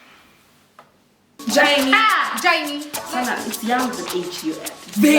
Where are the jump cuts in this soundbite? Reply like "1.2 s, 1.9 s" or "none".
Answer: 2.9 s